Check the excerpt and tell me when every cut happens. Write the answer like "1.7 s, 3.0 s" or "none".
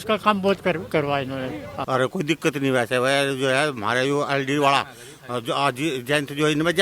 1.7 s